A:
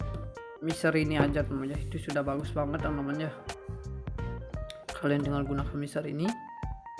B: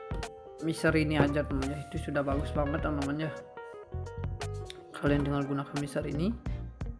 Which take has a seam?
B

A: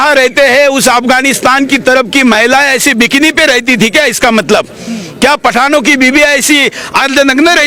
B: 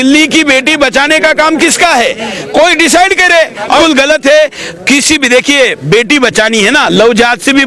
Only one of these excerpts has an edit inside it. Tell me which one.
B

